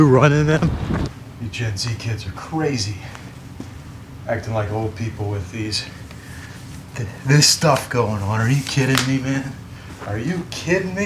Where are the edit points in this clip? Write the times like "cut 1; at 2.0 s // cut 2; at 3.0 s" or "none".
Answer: cut 1; at 1.1 s

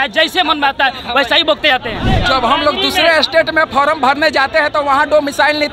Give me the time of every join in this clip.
cut 1; at 2.0 s

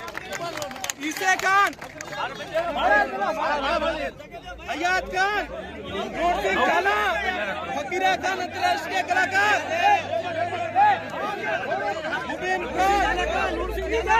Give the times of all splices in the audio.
none

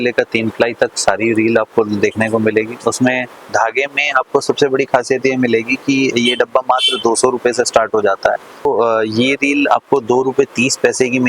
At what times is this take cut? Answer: cut 1; at 3.4 s // cut 2; at 8.7 s

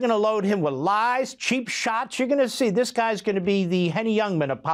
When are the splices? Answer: none

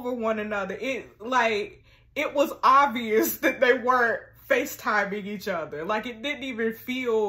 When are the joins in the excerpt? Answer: none

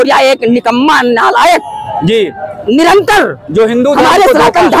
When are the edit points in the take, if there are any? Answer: none

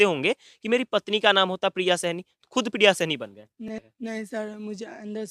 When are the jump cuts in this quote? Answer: cut 1; at 3.7 s

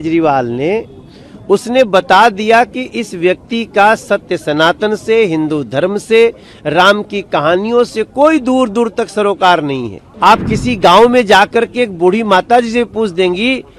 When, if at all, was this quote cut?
cut 1; at 10.0 s

